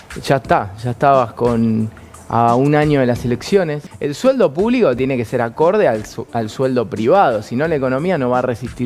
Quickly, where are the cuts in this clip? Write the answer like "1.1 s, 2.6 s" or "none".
3.8 s